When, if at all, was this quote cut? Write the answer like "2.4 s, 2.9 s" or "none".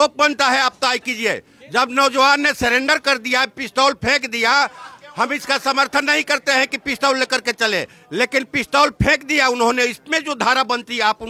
none

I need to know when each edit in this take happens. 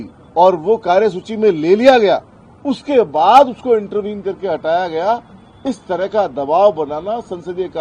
none

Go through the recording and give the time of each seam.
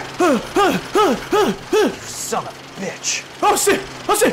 none

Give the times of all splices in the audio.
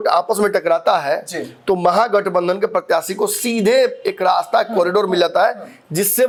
none

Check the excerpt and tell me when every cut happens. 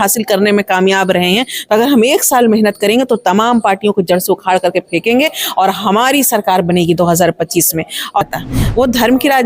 8.2 s

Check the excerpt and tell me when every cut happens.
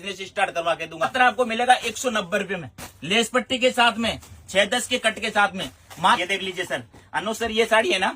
1.1 s, 6.2 s

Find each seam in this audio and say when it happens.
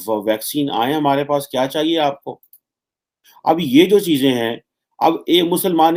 none

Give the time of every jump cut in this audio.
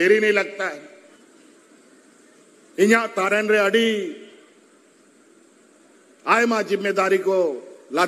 1.2 s

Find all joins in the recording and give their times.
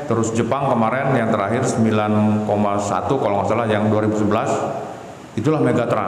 none

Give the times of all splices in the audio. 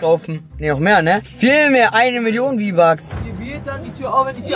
none

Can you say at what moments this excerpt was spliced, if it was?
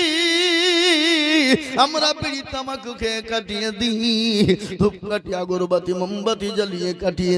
none

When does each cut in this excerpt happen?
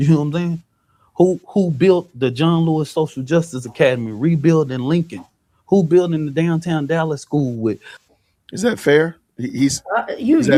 none

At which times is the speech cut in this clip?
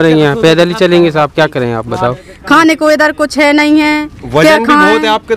2.3 s

